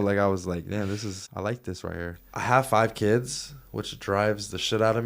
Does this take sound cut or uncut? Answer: cut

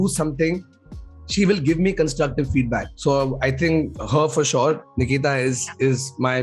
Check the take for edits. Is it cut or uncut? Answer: uncut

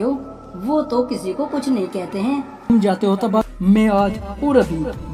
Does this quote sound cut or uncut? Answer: cut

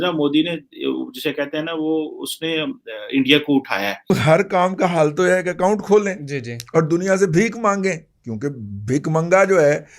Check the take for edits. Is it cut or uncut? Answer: cut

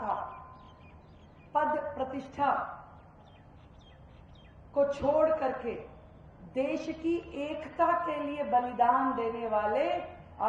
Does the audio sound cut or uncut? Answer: uncut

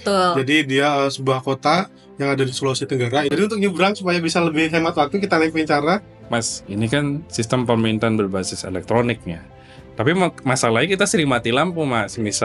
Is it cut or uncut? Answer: cut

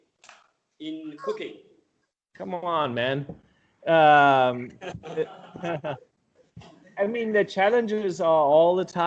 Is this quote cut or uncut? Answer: uncut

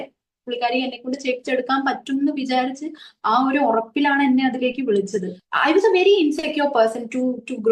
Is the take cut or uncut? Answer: cut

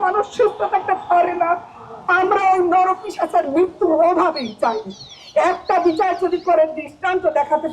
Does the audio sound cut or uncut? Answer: uncut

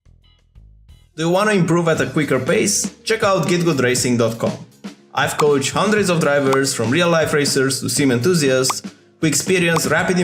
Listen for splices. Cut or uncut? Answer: cut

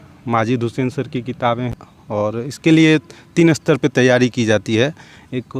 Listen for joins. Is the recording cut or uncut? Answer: cut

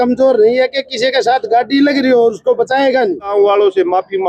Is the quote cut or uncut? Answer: cut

